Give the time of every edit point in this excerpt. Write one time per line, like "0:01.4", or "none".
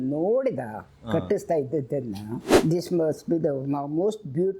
0:02.4